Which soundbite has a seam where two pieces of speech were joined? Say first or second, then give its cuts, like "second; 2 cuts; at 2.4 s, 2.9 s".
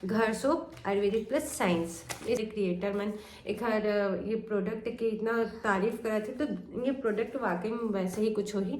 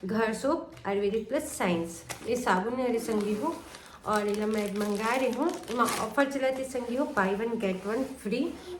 first; 1 cut; at 2.4 s